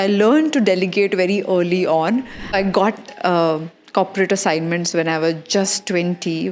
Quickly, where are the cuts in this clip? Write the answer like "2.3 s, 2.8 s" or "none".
2.5 s